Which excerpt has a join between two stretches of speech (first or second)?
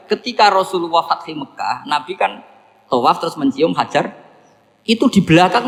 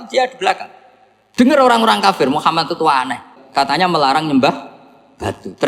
second